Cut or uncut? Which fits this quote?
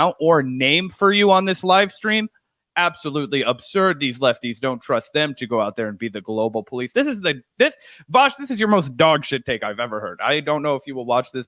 uncut